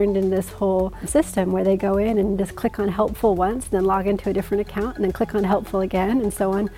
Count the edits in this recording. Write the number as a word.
one